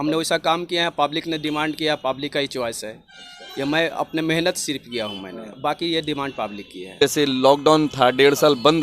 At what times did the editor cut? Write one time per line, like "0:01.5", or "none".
0:07.0